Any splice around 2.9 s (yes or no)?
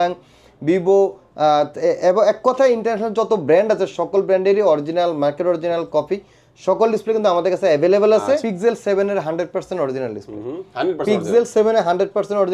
no